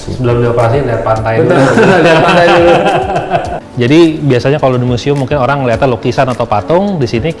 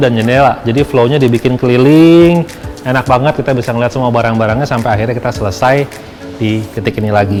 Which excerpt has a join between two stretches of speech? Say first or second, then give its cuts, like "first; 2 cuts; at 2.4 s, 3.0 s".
first; 1 cut; at 3.6 s